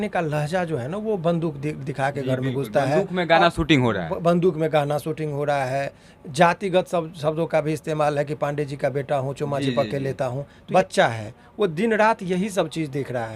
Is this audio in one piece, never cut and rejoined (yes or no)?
no